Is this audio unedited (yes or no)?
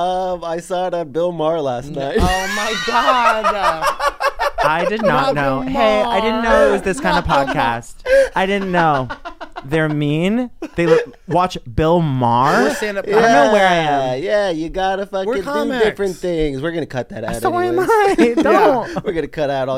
yes